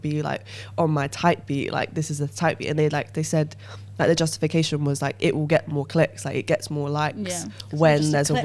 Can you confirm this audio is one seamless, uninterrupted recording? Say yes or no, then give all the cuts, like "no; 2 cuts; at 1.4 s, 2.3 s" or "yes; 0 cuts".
yes; 0 cuts